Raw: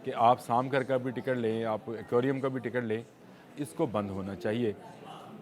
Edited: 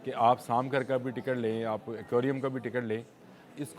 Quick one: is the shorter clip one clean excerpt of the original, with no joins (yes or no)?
yes